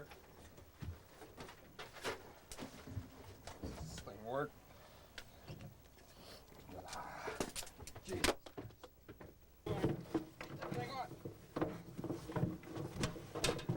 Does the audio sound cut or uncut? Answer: cut